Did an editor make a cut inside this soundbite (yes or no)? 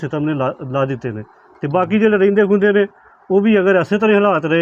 no